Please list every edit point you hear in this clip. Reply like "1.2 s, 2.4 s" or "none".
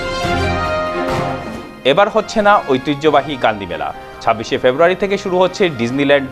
1.4 s